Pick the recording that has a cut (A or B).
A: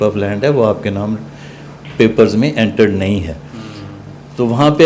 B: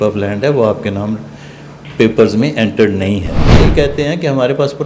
B